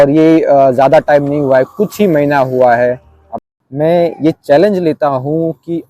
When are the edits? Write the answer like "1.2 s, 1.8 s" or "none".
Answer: 3.4 s